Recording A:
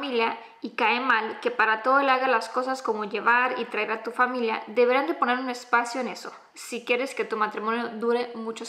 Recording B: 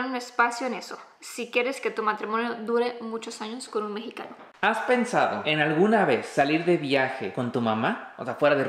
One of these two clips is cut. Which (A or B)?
B